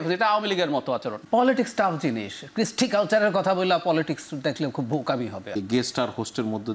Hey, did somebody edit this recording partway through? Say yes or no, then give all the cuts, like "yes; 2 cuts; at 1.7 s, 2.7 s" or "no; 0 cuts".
yes; 2 cuts; at 1.2 s, 5.6 s